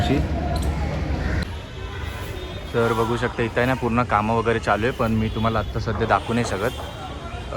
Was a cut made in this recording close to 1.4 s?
yes; 1 cut; at 1.4 s

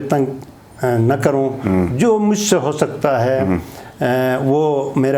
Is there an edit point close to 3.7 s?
no; 0 cuts

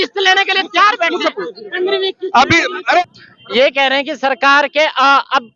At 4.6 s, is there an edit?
no; 1 cut; at 3.0 s

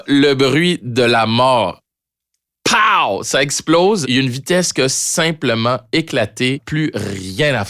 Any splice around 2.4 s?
no; 2 cuts; at 4.1 s, 6.6 s

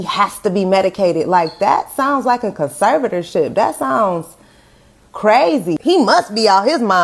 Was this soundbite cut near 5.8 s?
yes; 1 cut; at 5.8 s

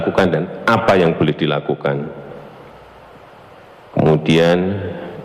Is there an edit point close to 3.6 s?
yes; 1 cut; at 3.6 s

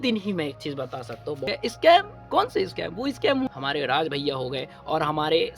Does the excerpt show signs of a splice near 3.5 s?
yes; 2 cuts; at 1.5 s, 3.5 s

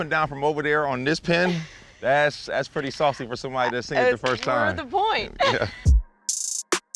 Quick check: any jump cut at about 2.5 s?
no; 1 cut; at 5.9 s

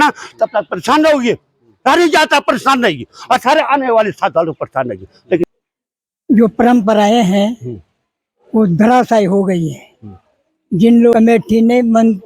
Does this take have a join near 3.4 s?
no; 2 cuts; at 5.4 s, 11.1 s

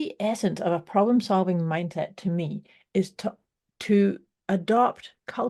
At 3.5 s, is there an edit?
no; 0 cuts

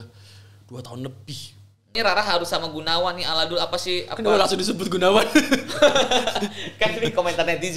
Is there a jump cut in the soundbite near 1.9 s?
yes; 1 cut; at 1.9 s

